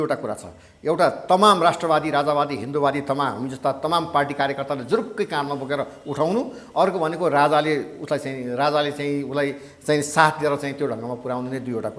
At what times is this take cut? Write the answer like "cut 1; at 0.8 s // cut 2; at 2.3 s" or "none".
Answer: none

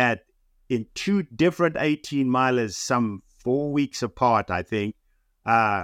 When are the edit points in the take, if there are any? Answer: none

